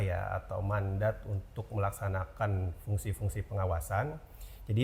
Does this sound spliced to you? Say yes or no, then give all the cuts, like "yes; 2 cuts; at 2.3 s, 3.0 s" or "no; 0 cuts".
no; 0 cuts